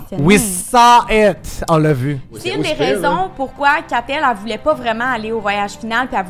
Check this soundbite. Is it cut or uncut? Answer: cut